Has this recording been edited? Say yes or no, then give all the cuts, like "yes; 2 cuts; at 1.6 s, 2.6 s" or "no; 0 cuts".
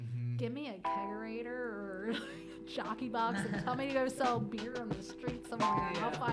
no; 0 cuts